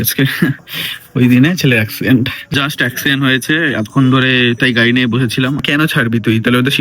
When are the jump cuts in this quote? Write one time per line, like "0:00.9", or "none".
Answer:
0:02.5
0:05.6